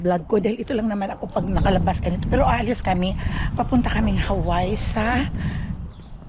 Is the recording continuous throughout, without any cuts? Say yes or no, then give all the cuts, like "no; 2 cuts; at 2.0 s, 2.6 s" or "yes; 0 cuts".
yes; 0 cuts